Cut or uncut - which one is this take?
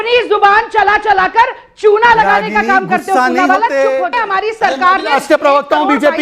cut